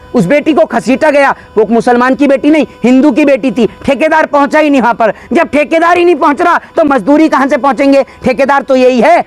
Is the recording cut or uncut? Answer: uncut